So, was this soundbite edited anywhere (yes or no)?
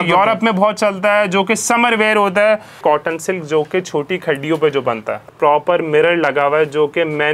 yes